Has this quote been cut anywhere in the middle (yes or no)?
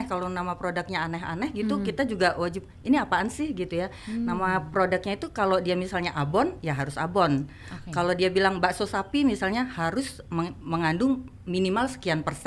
no